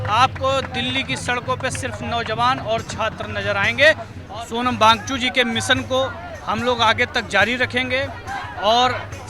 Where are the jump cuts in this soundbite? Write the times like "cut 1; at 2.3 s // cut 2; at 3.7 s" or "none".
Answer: cut 1; at 4.1 s